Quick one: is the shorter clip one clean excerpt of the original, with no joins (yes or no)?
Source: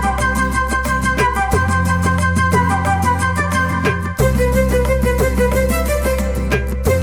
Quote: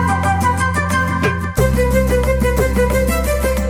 yes